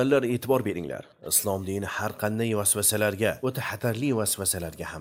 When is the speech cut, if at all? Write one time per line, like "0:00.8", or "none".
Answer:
none